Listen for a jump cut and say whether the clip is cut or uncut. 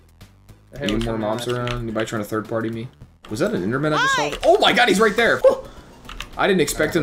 cut